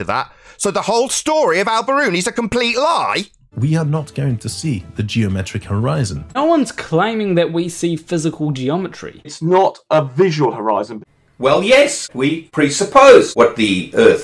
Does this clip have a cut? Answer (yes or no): yes